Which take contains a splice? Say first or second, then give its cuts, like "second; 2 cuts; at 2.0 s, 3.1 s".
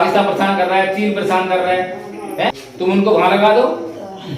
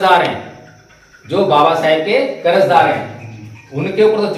first; 1 cut; at 2.5 s